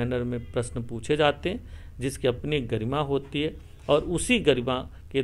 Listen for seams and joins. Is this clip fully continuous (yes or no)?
yes